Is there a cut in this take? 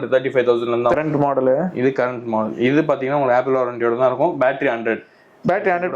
no; 0 cuts

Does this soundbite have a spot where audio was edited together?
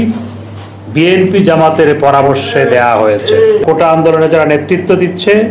yes; 1 cut; at 3.6 s

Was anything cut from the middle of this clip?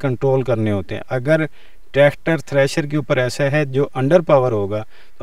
no; 0 cuts

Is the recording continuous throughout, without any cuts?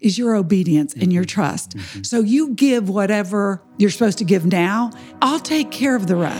no; 2 cuts; at 3.6 s, 5.0 s

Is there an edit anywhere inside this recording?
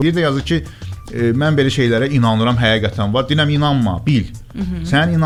no; 0 cuts

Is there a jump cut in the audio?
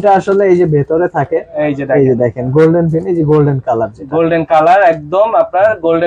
no; 0 cuts

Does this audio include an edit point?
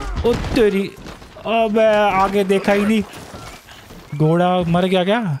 no; 0 cuts

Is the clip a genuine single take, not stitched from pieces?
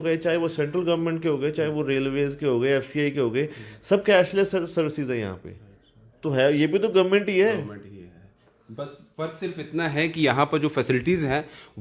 yes; 0 cuts

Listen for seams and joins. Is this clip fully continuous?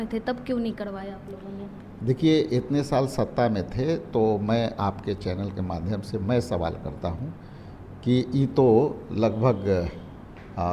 yes; 0 cuts

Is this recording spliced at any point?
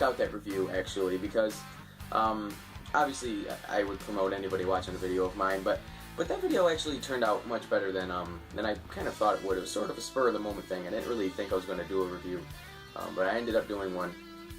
yes; 1 cut; at 8.2 s

